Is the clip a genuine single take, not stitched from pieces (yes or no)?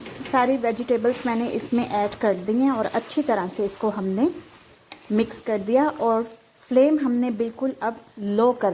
yes